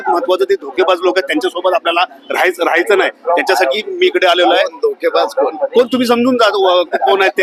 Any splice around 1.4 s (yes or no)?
no